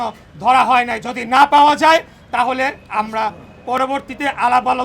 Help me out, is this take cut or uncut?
cut